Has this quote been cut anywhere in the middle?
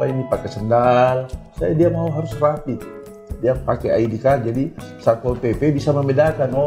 no; 0 cuts

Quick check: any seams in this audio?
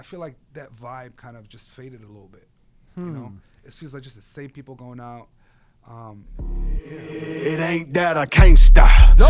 yes; 1 cut; at 6.3 s

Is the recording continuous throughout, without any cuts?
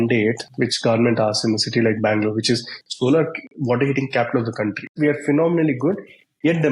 no; 1 cut; at 4.9 s

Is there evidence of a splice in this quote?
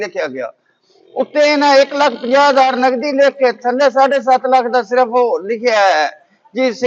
no; 0 cuts

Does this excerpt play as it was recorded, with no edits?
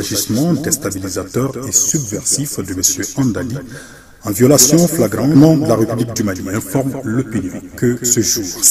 no; 1 cut; at 5.4 s

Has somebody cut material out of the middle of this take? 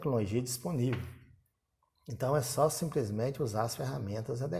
no; 0 cuts

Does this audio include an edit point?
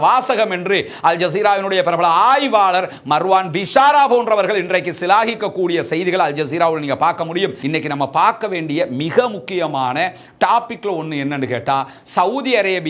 yes; 1 cut; at 7.6 s

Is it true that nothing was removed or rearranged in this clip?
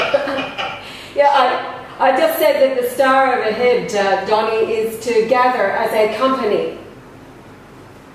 no; 1 cut; at 3.0 s

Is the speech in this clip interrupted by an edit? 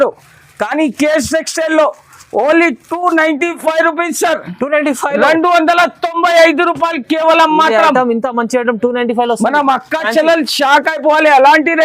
no; 0 cuts

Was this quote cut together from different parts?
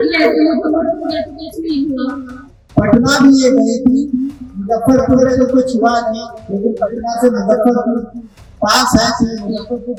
no; 0 cuts

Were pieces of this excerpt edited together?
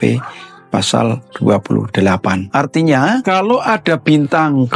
yes; 3 cuts; at 1.3 s, 2.5 s, 3.2 s

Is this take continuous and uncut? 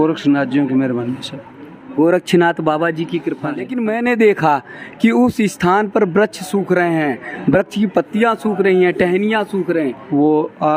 no; 1 cut; at 3.7 s

